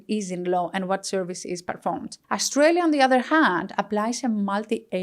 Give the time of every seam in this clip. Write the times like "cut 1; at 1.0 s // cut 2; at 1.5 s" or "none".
cut 1; at 2.1 s